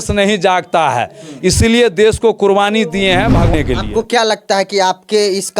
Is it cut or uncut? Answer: cut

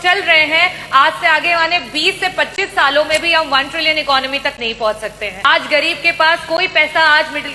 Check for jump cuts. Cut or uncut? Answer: cut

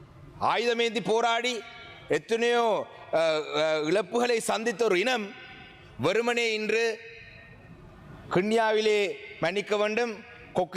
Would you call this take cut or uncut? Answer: uncut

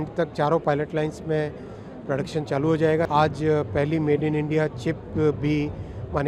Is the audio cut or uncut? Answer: cut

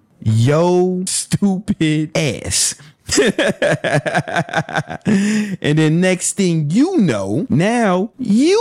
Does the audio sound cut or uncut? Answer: cut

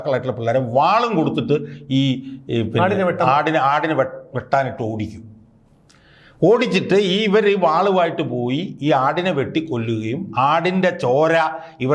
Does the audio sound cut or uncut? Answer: uncut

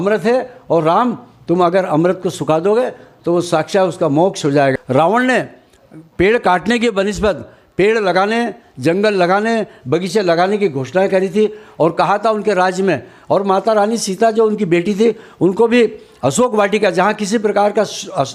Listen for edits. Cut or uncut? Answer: uncut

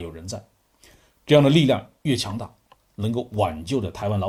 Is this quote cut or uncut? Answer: uncut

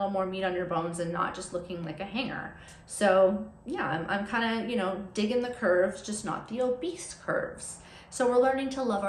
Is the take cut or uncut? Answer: uncut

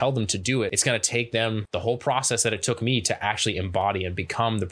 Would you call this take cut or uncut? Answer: cut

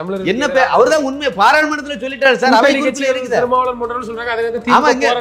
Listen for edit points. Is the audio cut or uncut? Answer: uncut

